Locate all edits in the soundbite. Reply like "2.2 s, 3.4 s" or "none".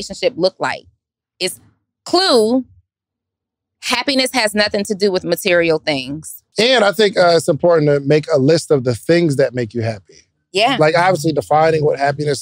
6.4 s